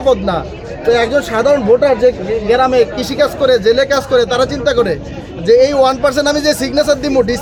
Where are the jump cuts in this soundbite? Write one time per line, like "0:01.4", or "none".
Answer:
none